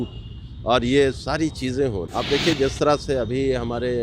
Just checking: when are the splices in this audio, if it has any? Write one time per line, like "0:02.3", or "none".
0:02.0